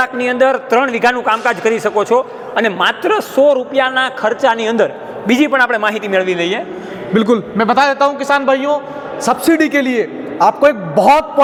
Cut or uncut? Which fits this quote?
uncut